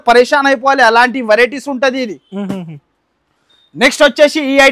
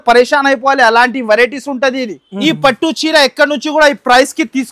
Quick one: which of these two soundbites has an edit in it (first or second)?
second